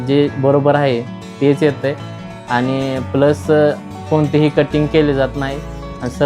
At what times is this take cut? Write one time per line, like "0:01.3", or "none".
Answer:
none